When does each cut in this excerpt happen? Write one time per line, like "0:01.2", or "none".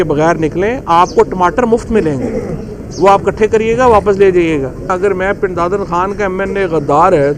0:04.9